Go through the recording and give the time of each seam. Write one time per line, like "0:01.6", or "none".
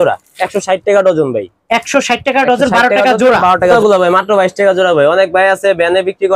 0:03.7